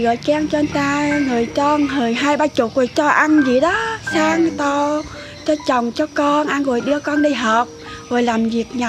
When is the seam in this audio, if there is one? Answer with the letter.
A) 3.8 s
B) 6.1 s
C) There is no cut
C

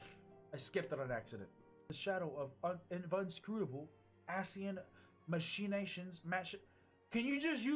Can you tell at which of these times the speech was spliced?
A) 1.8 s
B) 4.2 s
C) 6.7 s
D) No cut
A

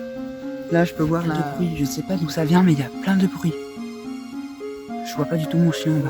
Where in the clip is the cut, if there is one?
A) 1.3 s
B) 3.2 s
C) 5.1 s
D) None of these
A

